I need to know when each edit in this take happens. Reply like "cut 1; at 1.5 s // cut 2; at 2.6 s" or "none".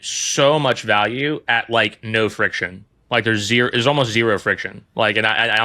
none